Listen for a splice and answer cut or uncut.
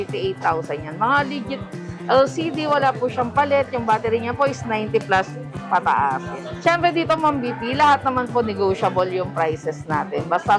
cut